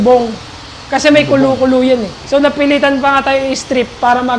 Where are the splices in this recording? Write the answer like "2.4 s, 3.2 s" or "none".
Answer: 2.2 s